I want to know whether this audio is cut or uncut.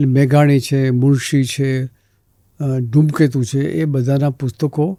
uncut